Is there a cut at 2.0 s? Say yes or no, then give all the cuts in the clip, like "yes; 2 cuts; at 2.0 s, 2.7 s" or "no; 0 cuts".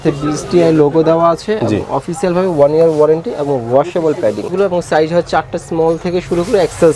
no; 1 cut; at 4.5 s